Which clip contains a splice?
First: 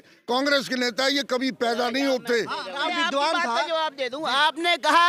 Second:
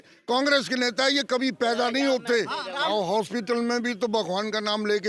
second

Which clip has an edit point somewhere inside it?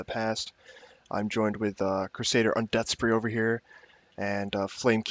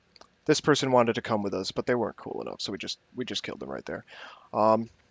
second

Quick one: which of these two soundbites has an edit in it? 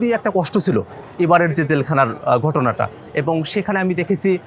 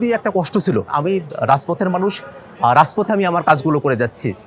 second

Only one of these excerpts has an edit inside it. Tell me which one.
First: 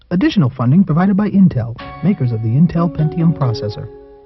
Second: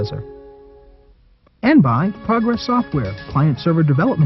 second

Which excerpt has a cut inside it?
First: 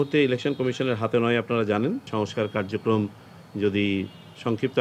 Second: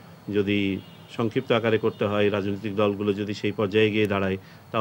first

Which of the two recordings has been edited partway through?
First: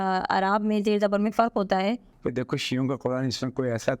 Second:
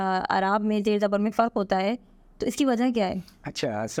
first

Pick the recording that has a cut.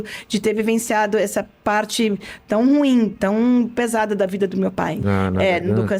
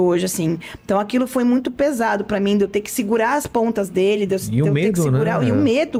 first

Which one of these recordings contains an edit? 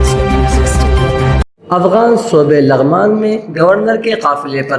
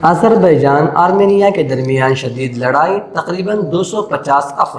first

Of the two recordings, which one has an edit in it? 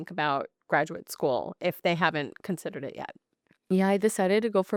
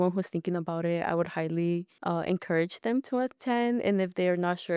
second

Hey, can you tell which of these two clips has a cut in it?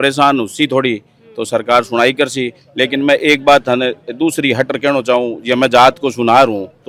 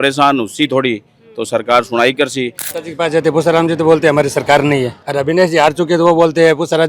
second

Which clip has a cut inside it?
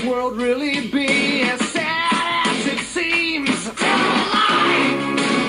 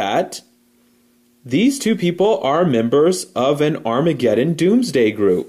second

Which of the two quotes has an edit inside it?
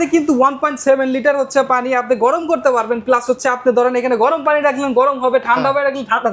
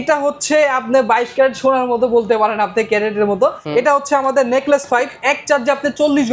second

